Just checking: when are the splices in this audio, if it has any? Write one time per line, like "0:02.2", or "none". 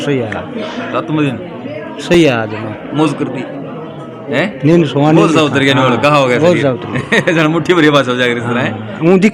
none